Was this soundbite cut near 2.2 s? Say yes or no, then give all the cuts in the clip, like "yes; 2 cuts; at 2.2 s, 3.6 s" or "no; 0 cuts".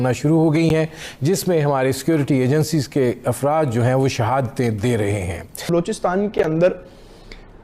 no; 1 cut; at 5.7 s